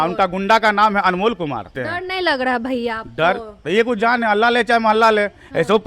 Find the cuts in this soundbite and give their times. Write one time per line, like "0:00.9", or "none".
0:01.8